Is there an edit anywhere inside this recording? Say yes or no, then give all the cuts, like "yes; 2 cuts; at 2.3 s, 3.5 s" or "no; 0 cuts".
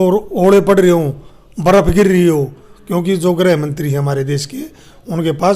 no; 0 cuts